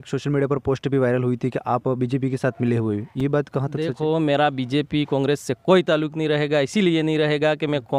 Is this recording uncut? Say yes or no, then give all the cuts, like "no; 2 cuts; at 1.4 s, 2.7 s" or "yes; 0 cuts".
yes; 0 cuts